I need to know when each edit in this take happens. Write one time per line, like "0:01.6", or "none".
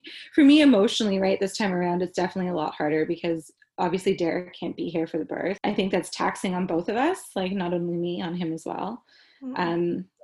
0:05.6